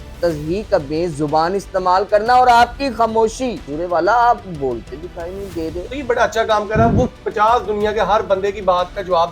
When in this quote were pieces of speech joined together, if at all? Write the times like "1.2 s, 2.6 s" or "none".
3.7 s, 5.9 s